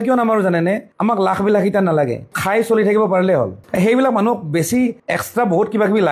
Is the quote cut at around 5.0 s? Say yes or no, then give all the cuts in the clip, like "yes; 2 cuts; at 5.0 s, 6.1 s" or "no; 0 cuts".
no; 1 cut; at 2.3 s